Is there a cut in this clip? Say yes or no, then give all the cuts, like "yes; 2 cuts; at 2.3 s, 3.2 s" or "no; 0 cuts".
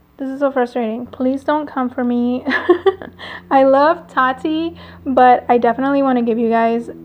yes; 1 cut; at 1.1 s